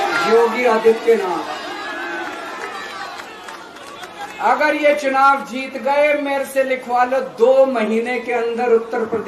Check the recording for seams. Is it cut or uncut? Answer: uncut